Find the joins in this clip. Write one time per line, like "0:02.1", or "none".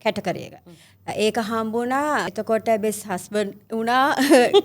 0:02.3